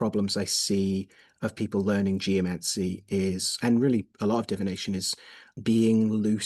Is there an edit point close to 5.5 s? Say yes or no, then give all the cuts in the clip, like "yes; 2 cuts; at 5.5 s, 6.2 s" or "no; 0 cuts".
yes; 1 cut; at 5.5 s